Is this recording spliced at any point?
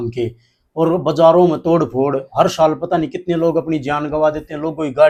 no; 0 cuts

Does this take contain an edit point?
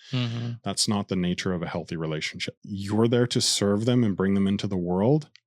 yes; 1 cut; at 2.7 s

